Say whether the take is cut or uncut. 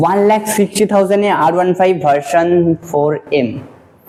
uncut